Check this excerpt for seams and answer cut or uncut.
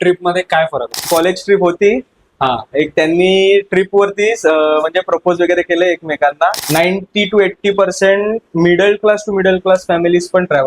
cut